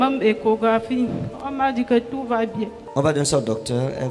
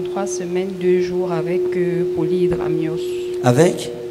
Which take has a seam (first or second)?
first